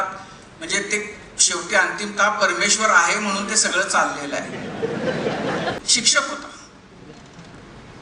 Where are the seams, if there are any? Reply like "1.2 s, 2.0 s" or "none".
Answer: 5.8 s